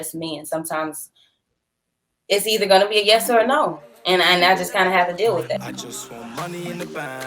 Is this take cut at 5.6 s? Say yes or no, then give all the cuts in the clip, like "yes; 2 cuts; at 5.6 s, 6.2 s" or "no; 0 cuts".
yes; 1 cut; at 5.6 s